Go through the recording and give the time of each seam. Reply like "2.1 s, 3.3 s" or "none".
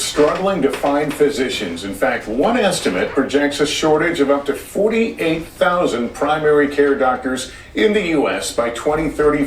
3.6 s